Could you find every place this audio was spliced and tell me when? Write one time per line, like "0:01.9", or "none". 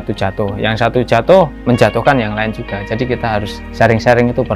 0:03.6